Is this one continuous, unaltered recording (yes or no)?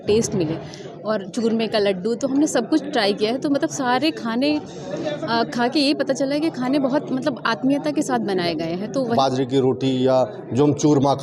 no